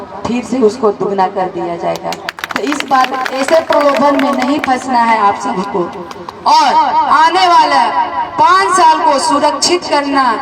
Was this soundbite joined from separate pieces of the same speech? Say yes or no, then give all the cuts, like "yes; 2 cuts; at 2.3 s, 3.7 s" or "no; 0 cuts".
no; 0 cuts